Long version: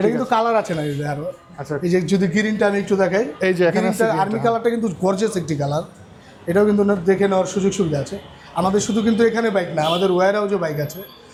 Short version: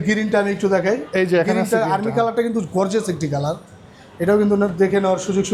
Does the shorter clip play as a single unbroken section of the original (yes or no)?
yes